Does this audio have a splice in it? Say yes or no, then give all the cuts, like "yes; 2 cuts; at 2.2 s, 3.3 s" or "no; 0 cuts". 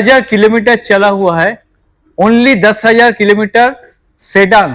no; 0 cuts